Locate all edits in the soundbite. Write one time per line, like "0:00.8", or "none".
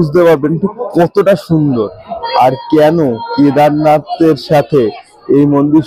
none